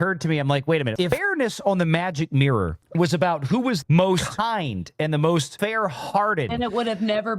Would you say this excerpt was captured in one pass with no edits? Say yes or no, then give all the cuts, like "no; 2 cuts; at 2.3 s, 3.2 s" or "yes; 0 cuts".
no; 4 cuts; at 1.0 s, 3.8 s, 5.5 s, 6.5 s